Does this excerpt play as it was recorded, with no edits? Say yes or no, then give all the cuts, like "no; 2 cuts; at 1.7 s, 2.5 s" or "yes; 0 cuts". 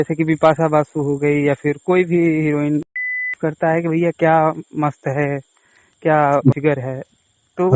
no; 2 cuts; at 3.0 s, 6.5 s